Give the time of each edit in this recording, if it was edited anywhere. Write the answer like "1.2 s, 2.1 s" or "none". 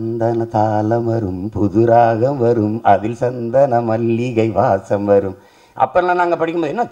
none